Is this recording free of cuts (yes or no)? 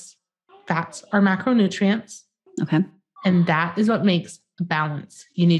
yes